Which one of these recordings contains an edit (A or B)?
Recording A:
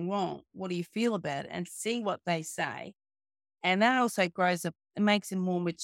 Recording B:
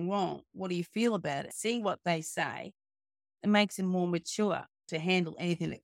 B